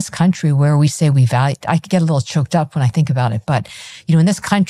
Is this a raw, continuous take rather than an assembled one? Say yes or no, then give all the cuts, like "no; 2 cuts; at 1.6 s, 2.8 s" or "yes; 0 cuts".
yes; 0 cuts